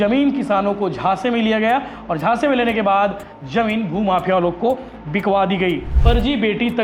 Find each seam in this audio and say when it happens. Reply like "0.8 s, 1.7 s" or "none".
5.9 s